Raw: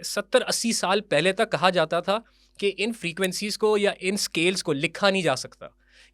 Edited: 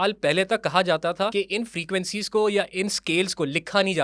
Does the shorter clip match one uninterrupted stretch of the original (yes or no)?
no